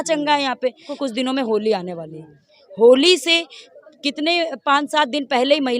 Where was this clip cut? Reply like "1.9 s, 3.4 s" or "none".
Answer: 0.9 s